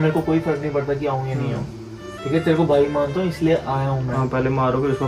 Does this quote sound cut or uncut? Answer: uncut